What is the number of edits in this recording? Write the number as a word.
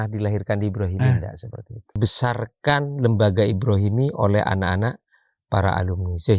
one